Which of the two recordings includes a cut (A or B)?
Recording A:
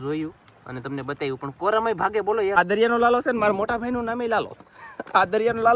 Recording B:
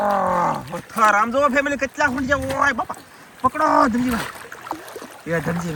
A